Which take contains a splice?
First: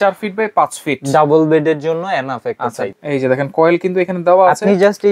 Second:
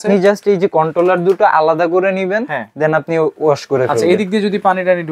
first; 1 cut; at 2.9 s

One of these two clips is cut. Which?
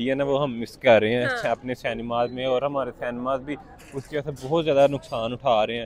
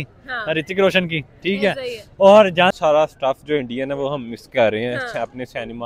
second; 1 cut; at 2.7 s

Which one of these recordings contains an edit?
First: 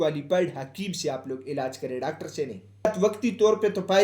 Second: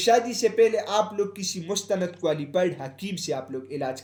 first; 1 cut; at 2.9 s

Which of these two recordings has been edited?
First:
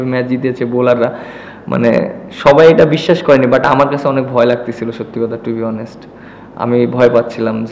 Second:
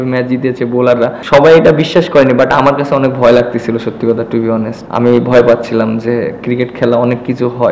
second; 2 cuts; at 1.2 s, 4.8 s

